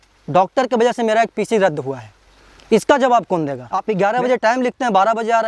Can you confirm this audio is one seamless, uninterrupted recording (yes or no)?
no